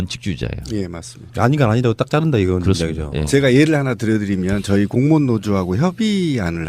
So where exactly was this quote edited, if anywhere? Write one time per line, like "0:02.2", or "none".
0:05.8